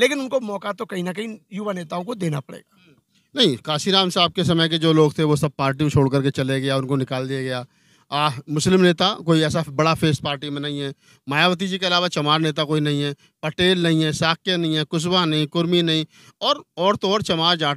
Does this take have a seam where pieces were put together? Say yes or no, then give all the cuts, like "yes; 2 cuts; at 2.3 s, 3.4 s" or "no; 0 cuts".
no; 0 cuts